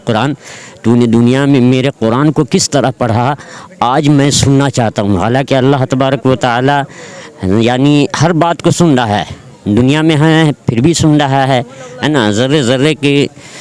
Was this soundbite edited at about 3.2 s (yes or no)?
no